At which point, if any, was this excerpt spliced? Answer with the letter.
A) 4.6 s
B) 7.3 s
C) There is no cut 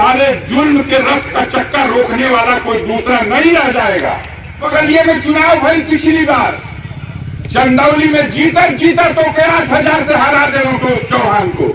A